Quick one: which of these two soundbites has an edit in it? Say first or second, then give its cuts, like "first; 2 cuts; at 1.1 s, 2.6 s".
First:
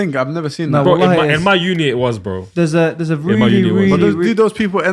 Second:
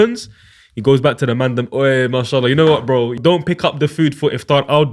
second; 1 cut; at 3.2 s